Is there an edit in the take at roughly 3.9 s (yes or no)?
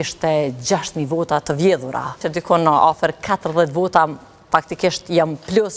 no